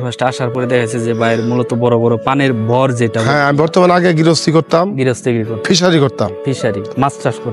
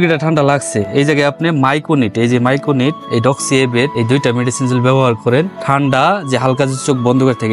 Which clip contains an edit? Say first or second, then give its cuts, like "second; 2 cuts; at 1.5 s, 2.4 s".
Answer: second; 3 cuts; at 3.0 s, 3.9 s, 5.6 s